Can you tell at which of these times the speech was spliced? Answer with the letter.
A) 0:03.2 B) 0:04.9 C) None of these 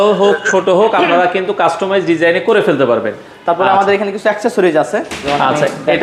C